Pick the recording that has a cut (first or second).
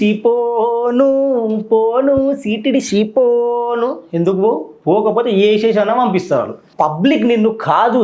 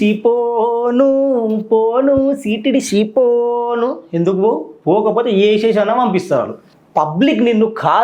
first